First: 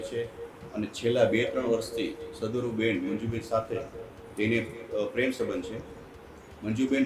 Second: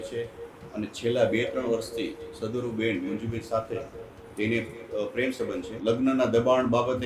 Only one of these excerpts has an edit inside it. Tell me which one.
second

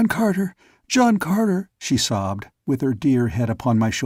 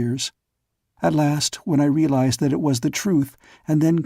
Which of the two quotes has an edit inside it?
second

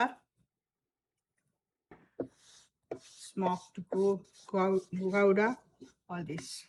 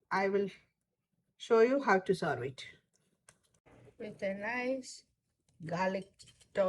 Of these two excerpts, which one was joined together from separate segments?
second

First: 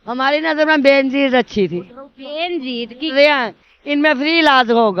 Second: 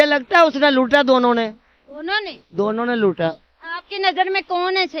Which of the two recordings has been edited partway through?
first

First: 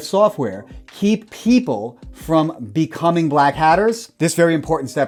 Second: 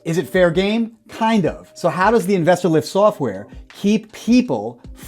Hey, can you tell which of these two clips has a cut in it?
second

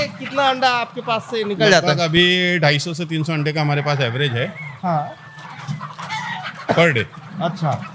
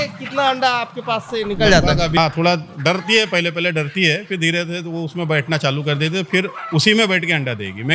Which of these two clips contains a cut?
second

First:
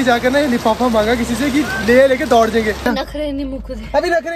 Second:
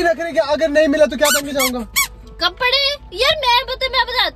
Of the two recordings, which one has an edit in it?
first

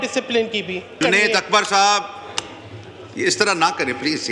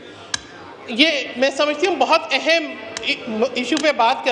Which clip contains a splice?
first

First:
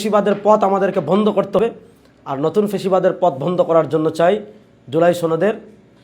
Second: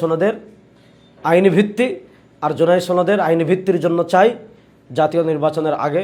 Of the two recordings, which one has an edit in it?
first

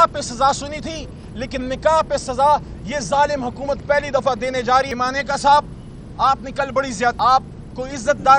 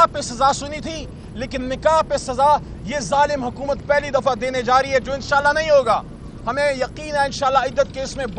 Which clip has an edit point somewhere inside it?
first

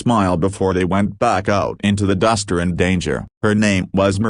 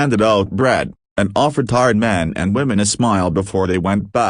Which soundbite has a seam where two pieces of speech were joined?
first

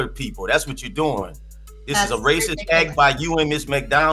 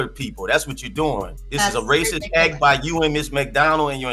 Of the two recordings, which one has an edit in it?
second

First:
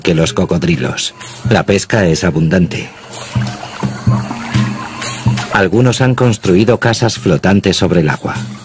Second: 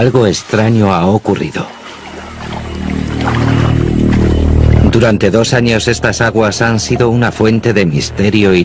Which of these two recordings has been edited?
first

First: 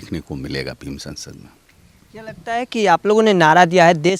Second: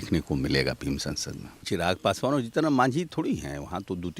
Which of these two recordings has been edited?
second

